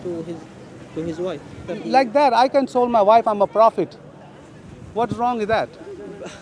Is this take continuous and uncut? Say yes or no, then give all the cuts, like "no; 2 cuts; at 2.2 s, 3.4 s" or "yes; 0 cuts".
no; 1 cut; at 1.6 s